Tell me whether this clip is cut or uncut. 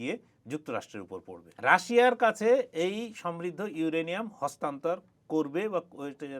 cut